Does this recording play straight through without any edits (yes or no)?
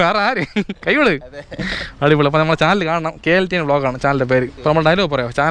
no